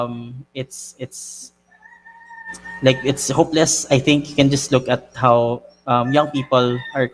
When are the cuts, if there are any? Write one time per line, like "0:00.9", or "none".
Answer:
none